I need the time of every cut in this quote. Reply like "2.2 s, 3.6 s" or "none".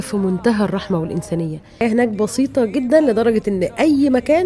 1.8 s